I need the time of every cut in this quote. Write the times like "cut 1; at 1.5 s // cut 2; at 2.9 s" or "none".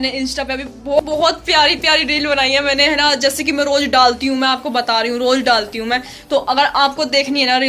cut 1; at 1.0 s